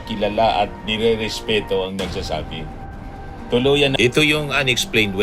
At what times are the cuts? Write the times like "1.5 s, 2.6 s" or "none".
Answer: 3.9 s